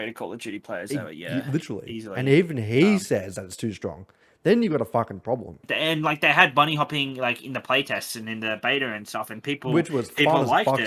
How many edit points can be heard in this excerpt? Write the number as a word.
one